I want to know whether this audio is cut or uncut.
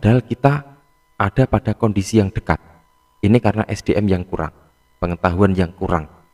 uncut